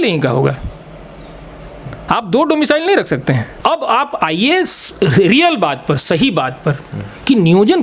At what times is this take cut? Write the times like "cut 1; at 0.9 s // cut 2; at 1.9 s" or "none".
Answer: cut 1; at 3.5 s